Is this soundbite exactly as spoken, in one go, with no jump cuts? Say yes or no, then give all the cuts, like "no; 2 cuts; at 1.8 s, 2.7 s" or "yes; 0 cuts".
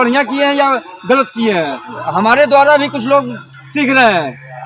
no; 1 cut; at 2.0 s